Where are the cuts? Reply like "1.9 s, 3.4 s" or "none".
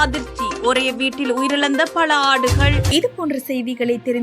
none